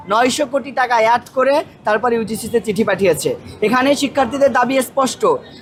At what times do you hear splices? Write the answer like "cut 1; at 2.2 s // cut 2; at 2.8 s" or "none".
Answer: none